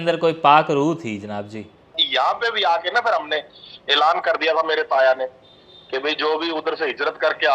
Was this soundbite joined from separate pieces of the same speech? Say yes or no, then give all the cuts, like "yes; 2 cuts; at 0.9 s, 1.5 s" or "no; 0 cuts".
yes; 1 cut; at 2.0 s